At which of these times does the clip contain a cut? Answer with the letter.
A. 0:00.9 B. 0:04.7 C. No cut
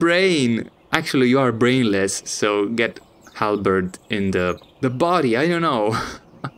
B